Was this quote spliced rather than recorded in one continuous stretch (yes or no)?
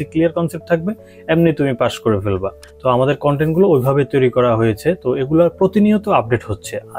no